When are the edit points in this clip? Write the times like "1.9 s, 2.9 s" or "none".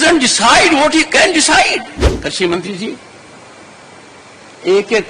2.0 s